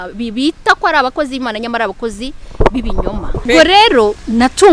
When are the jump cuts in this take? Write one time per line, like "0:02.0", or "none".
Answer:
0:03.5